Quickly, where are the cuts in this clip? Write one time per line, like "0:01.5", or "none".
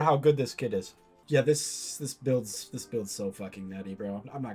0:01.0